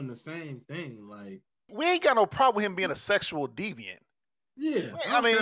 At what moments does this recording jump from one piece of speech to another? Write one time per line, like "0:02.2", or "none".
0:01.7